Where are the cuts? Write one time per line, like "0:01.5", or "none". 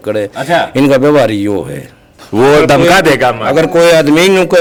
none